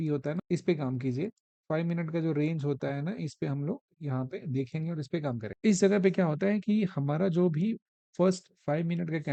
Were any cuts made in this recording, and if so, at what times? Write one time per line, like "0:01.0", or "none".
none

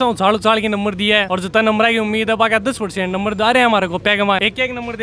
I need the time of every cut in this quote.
none

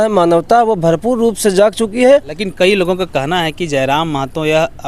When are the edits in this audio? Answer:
0:02.4

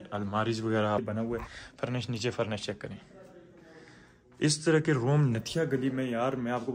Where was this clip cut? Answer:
0:01.0

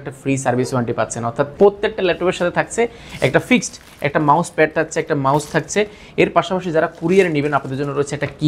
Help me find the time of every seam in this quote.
0:01.5

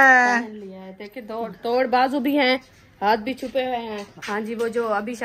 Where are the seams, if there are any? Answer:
0:04.1

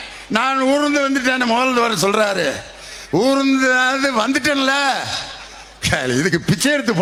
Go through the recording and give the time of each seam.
none

